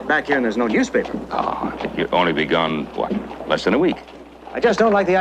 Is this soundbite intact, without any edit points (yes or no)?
yes